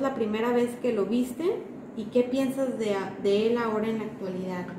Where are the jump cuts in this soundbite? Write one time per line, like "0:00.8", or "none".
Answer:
none